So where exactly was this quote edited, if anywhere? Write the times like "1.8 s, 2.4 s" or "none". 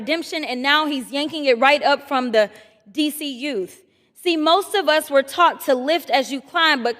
none